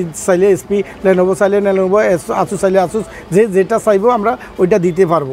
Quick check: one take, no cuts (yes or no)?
yes